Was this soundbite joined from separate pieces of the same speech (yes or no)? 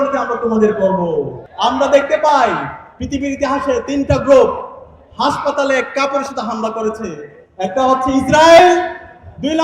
yes